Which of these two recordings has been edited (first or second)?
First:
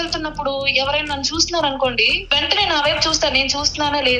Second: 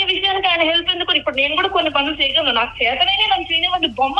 first